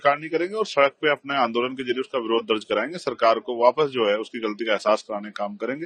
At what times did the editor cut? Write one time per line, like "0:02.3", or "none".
none